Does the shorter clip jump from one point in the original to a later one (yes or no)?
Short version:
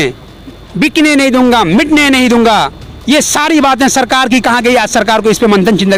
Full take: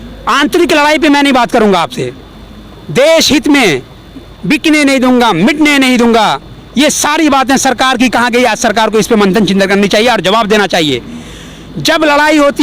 no